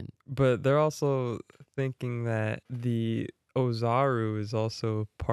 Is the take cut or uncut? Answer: cut